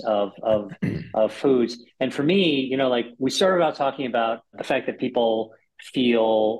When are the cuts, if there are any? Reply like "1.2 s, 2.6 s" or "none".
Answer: 4.6 s